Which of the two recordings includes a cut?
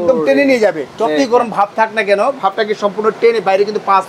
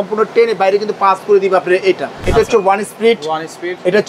second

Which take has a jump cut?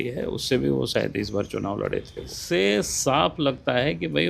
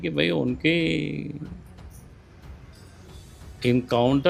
first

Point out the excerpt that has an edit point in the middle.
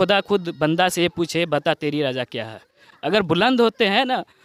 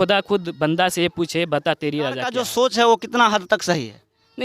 second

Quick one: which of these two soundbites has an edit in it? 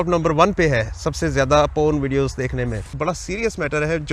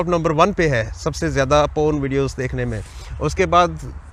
first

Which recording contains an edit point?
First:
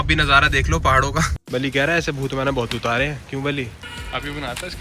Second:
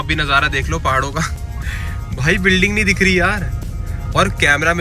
first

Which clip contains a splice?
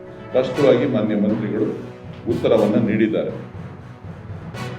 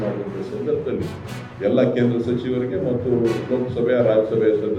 first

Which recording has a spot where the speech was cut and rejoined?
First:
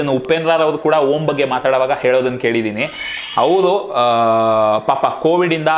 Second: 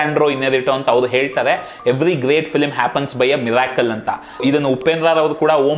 first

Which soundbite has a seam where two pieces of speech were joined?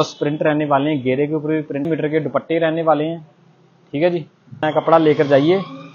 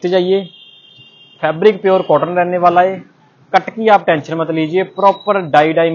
first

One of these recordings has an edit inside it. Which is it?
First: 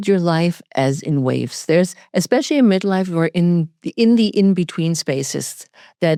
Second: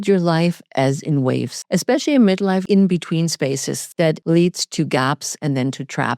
second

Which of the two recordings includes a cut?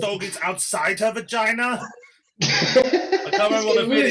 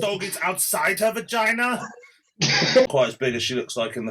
second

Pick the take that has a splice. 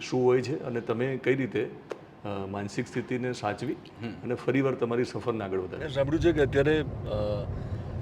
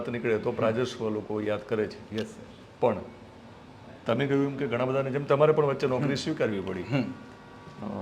first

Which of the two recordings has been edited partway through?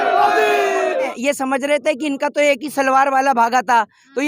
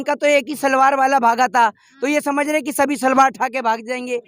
first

